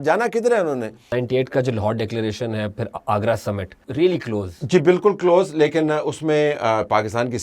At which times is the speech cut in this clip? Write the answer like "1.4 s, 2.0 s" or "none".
1.0 s, 3.8 s